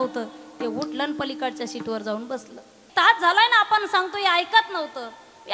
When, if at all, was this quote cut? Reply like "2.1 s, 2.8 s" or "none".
2.9 s